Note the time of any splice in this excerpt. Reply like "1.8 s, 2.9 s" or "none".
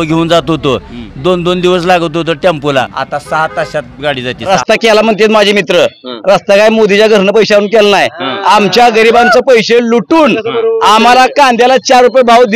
3.0 s, 4.5 s

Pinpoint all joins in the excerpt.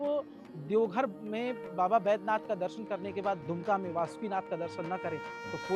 3.4 s

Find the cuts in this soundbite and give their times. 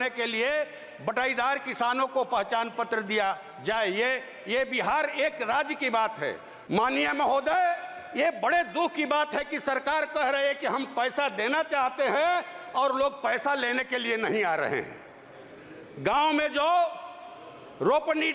6.5 s

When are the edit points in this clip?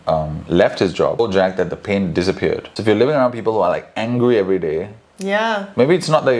1.2 s, 2.6 s

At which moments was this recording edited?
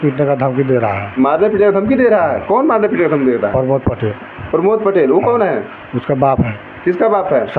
none

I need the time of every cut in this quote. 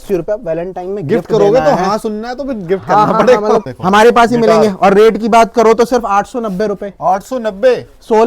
3.6 s

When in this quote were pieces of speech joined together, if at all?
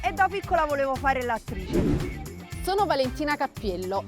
1.6 s, 2.4 s

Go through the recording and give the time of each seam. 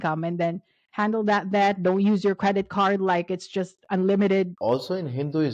4.5 s

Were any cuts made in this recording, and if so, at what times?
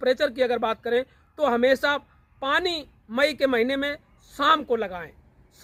none

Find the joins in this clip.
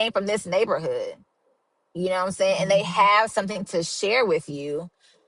none

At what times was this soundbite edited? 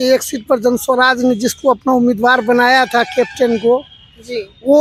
none

